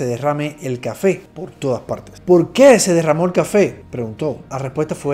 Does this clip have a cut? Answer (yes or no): no